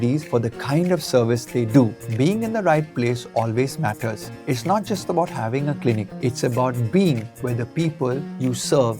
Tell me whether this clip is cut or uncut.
cut